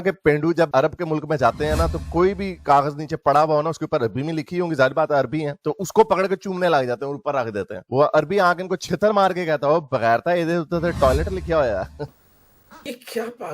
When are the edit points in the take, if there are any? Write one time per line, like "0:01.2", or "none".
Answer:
0:12.2